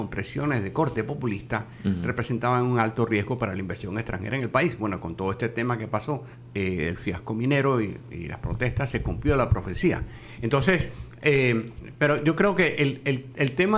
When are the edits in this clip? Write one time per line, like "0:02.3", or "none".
0:06.4
0:11.8